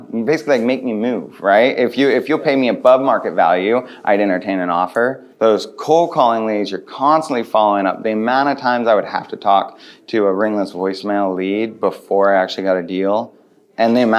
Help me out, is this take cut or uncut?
uncut